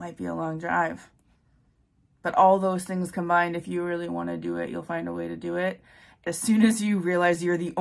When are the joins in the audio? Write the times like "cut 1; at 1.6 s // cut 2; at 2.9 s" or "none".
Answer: cut 1; at 6.2 s